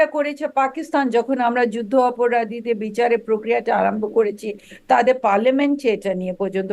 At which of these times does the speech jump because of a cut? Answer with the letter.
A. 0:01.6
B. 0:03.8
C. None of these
C